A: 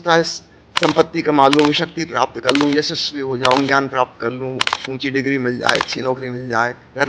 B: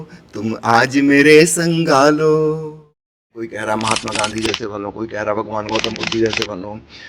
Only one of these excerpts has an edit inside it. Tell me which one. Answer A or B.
B